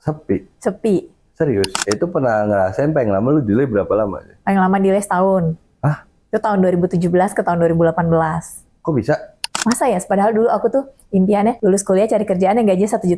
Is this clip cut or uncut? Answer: cut